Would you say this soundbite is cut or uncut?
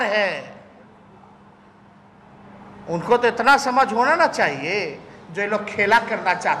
uncut